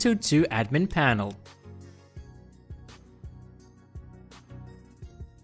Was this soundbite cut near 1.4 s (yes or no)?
yes